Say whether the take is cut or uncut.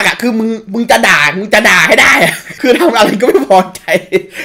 cut